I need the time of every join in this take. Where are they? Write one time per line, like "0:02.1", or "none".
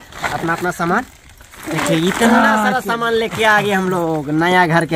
none